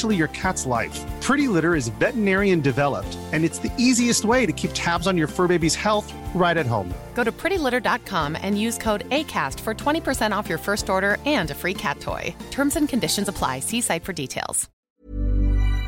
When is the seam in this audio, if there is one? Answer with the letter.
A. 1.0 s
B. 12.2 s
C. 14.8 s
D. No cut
C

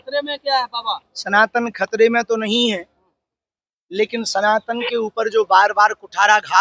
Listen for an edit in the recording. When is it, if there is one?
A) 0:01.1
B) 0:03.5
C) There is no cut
C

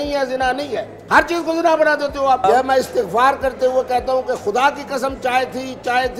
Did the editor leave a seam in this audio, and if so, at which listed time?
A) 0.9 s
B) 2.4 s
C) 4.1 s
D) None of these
B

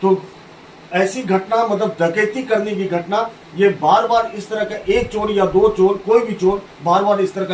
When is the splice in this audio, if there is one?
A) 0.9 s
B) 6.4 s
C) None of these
C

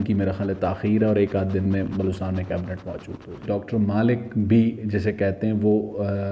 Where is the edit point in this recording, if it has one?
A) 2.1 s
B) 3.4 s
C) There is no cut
B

